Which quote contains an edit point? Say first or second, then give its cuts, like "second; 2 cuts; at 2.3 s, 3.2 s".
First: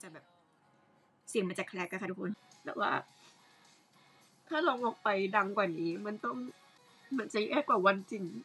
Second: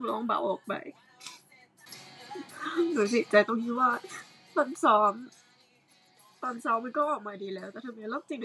first; 1 cut; at 2.4 s